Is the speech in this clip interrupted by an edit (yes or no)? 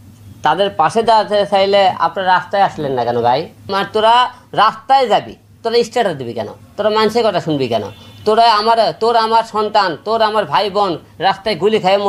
yes